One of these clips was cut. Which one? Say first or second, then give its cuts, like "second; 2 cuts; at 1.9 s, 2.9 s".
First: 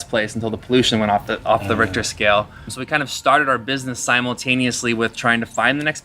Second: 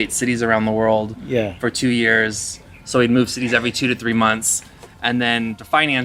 first; 1 cut; at 2.8 s